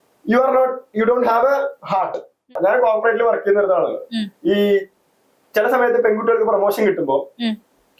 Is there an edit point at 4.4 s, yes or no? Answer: no